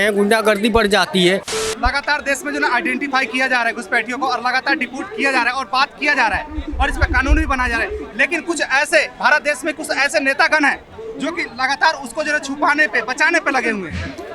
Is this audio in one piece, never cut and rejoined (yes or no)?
no